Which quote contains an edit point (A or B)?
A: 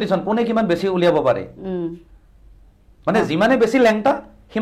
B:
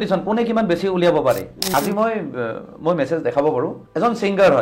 B